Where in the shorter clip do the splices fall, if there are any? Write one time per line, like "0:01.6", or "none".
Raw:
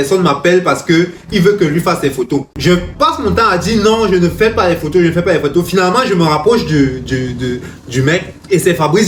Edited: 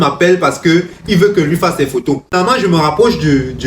0:02.3